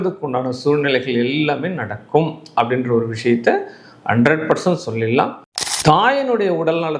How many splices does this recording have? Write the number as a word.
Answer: one